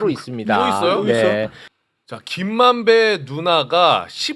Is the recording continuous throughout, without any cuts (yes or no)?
no